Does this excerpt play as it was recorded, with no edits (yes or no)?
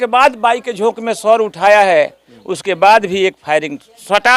yes